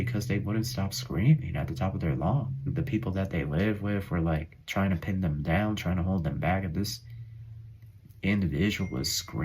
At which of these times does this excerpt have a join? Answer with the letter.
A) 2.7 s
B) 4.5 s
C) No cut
A